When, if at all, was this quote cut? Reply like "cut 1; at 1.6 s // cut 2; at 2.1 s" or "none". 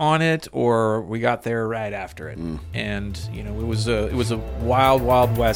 none